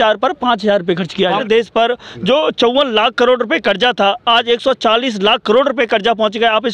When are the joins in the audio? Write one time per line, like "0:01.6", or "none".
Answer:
0:01.4